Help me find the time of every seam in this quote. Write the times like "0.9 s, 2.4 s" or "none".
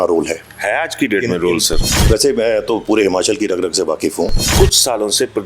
1.9 s, 4.5 s

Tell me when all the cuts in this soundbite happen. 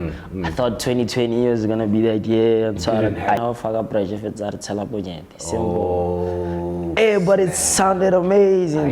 3.4 s

